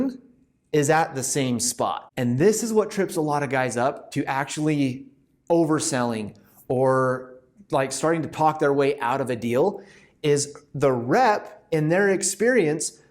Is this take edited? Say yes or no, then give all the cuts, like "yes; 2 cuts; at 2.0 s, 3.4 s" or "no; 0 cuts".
yes; 1 cut; at 2.1 s